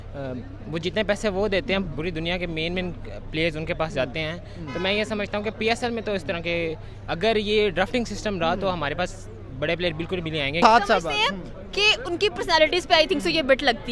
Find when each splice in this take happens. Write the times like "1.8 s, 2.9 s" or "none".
10.6 s